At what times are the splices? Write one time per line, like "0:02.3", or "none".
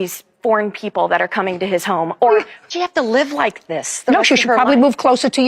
0:02.6